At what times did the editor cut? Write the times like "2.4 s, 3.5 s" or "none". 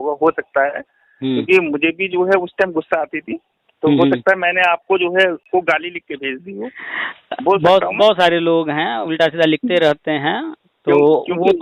5.5 s